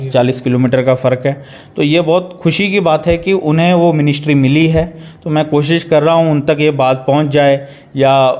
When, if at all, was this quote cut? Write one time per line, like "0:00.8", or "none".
none